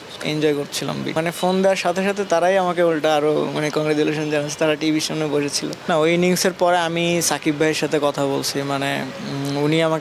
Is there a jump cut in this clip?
yes; 2 cuts; at 1.1 s, 5.7 s

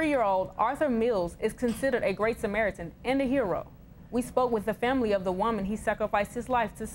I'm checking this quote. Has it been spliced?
no; 0 cuts

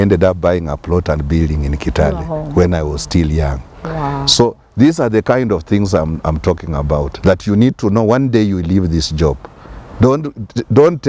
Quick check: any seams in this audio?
no; 0 cuts

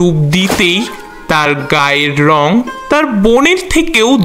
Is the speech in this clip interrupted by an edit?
no; 0 cuts

